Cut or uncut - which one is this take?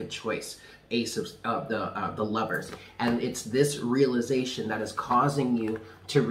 uncut